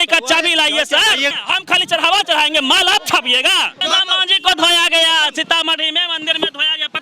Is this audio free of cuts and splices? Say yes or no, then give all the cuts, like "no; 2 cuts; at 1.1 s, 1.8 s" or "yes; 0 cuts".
no; 2 cuts; at 1.3 s, 3.8 s